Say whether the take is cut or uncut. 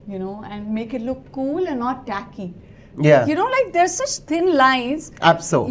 uncut